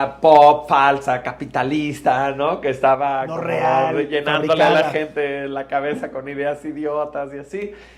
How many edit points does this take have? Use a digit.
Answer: 0